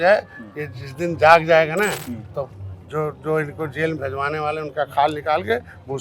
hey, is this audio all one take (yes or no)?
yes